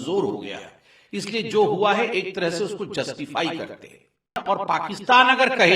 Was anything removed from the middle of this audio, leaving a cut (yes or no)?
yes